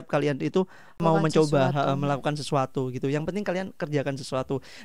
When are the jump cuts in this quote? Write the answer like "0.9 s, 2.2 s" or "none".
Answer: 1.0 s